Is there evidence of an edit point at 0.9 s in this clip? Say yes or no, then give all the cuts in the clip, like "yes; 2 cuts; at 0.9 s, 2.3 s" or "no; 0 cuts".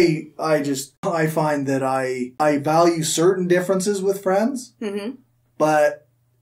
yes; 2 cuts; at 0.9 s, 2.3 s